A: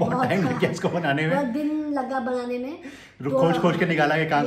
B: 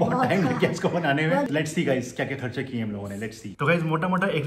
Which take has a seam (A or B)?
B